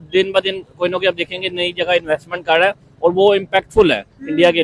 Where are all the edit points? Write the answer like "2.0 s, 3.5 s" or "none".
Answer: none